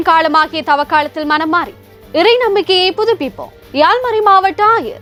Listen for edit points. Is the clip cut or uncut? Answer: uncut